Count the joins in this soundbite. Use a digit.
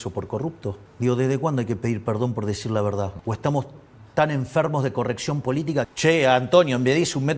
3